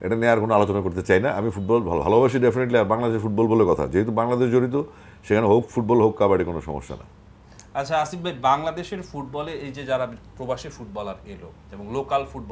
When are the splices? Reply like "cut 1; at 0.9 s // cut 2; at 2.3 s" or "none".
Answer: none